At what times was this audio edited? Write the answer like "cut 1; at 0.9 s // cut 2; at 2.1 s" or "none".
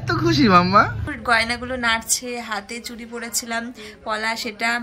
cut 1; at 1.0 s